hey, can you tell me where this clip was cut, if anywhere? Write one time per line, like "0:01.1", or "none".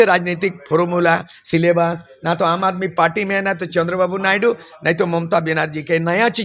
none